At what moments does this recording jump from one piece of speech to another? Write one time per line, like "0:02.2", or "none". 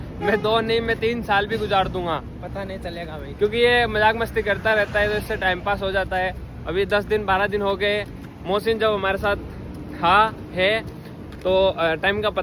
none